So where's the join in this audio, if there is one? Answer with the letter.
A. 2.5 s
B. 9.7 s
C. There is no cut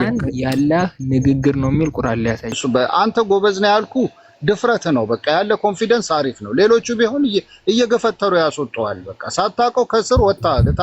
A